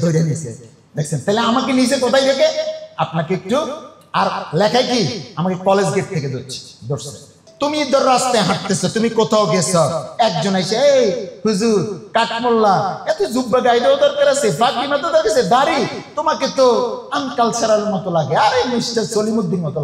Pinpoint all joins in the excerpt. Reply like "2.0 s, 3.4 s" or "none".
7.4 s

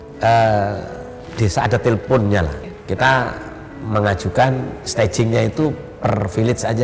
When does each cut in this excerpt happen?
2.6 s

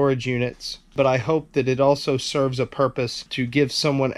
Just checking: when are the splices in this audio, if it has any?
0.9 s, 3.2 s

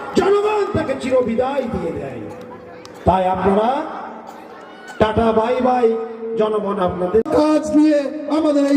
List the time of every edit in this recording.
7.3 s

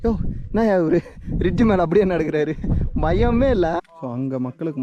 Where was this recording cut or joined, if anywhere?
3.8 s

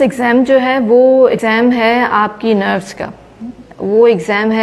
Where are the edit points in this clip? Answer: 1.3 s

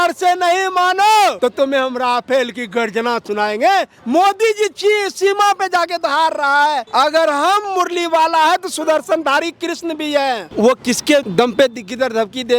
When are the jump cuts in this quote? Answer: 1.4 s, 4.0 s, 6.8 s, 10.5 s, 11.3 s

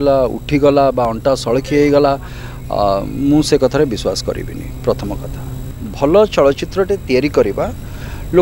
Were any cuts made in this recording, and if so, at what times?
5.8 s

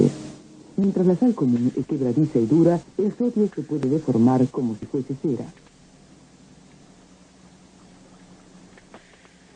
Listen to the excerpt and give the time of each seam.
none

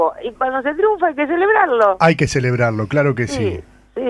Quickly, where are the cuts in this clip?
1.7 s

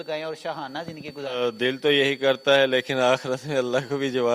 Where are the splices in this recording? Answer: 1.4 s

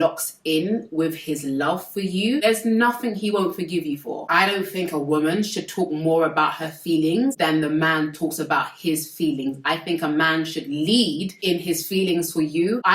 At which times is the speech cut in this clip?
4.2 s

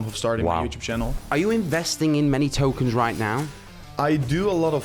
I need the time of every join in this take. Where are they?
1.2 s

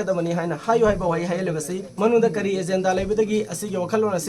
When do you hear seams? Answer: 1.8 s

